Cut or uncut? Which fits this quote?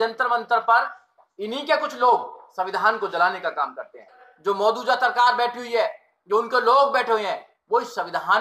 cut